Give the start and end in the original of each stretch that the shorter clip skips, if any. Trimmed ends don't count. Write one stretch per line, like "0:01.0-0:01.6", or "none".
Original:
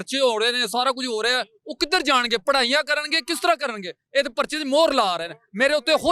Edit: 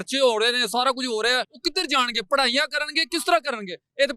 0:01.5-0:01.7